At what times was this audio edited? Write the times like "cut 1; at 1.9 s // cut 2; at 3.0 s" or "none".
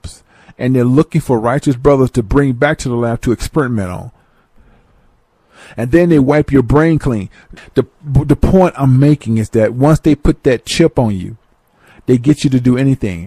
none